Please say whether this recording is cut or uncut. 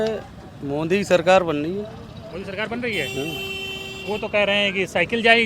uncut